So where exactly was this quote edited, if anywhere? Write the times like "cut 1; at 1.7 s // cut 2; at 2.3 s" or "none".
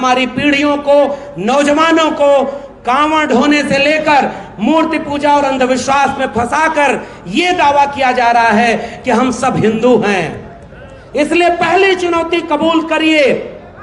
none